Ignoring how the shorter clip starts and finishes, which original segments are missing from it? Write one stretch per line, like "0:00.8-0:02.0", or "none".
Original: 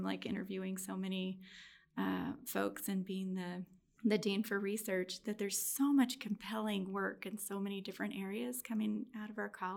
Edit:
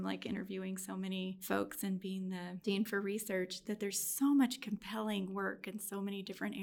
0:01.4-0:02.4
0:03.7-0:04.2